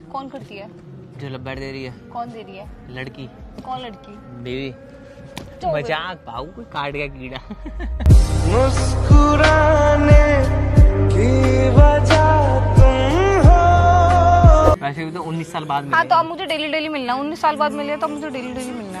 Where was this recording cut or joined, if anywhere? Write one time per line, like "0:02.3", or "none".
0:14.7